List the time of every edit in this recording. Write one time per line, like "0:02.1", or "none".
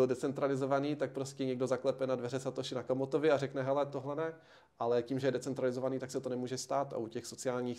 none